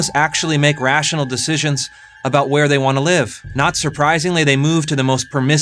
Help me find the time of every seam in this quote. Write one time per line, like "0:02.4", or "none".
0:03.4